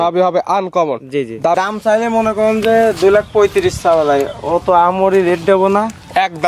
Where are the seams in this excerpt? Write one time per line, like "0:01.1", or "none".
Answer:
0:01.5